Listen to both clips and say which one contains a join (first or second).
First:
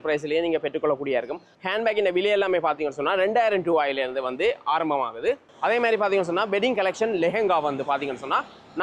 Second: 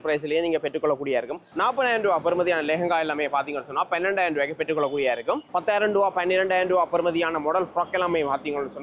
second